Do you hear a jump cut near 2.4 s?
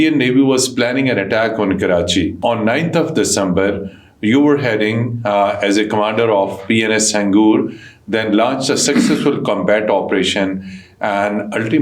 yes; 1 cut; at 2.4 s

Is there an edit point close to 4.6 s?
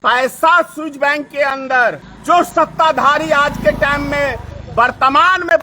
no; 1 cut; at 2.1 s

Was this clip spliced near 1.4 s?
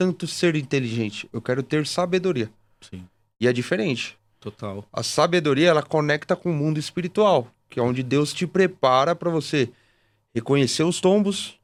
no; 0 cuts

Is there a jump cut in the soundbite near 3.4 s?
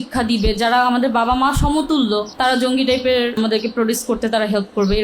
yes; 2 cuts; at 2.3 s, 3.4 s

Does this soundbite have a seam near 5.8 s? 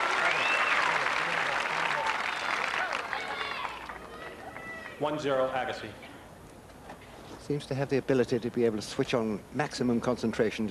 no; 1 cut; at 9.4 s

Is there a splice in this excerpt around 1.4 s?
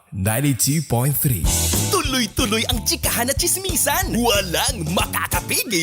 yes; 1 cut; at 1.4 s

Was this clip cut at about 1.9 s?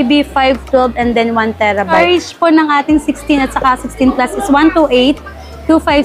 yes; 1 cut; at 1.9 s

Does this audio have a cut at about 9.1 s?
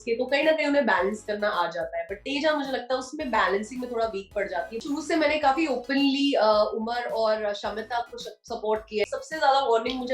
yes; 2 cuts; at 4.8 s, 9.1 s

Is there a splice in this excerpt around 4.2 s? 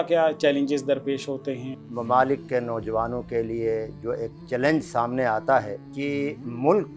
no; 2 cuts; at 1.7 s, 5.8 s

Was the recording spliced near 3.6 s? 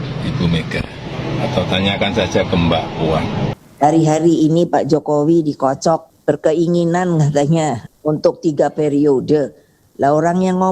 yes; 3 cuts; at 3.6 s, 6.1 s, 7.9 s

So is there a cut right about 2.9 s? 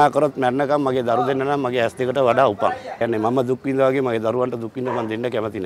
yes; 1 cut; at 2.9 s

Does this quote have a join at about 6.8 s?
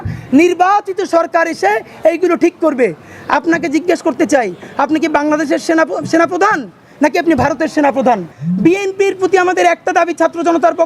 no; 1 cut; at 8.3 s

